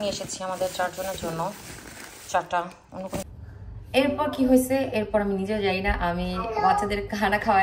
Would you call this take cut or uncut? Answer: cut